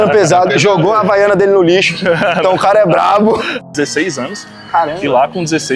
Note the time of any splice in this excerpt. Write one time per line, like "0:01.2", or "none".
0:03.5